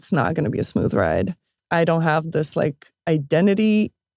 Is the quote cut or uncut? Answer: cut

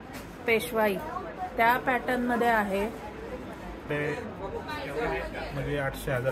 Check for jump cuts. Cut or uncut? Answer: cut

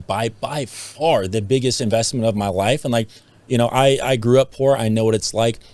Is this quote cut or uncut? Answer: uncut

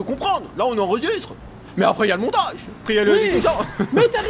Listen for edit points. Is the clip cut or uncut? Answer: cut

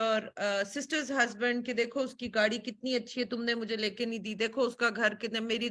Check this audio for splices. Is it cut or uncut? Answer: uncut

